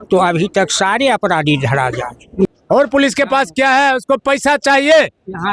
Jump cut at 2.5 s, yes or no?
yes